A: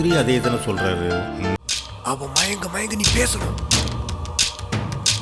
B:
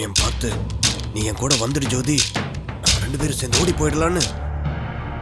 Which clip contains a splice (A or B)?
A